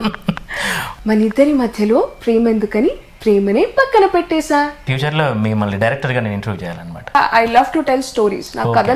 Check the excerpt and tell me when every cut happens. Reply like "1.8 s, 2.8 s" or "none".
0.9 s, 4.8 s, 7.1 s